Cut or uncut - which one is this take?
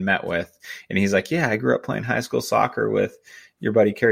uncut